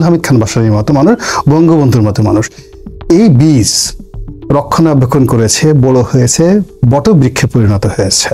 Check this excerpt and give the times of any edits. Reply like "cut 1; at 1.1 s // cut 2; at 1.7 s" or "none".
none